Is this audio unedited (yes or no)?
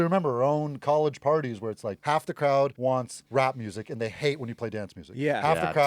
no